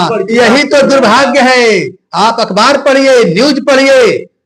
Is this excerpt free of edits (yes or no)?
yes